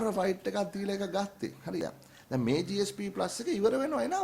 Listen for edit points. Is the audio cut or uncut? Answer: cut